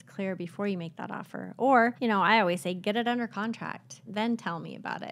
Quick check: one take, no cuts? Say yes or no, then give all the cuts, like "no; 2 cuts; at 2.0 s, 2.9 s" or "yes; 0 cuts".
no; 2 cuts; at 2.0 s, 4.1 s